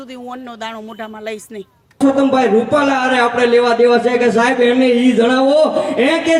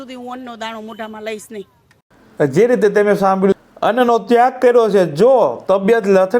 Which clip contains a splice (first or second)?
first